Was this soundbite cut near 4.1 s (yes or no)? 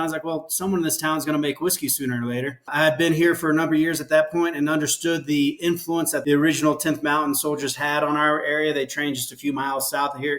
no